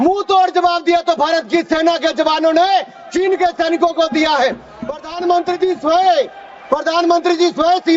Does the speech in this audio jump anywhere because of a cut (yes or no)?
no